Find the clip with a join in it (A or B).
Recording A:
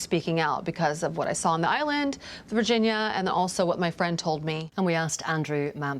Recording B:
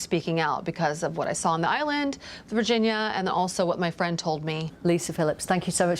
A